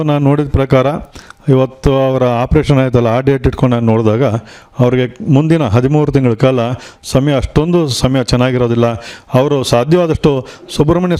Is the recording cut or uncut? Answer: uncut